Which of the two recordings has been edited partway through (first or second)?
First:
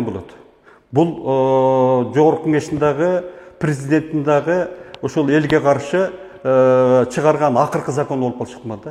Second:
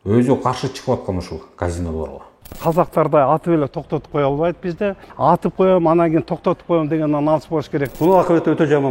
second